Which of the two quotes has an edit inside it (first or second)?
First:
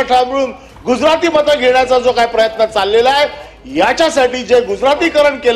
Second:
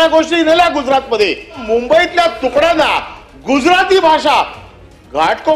second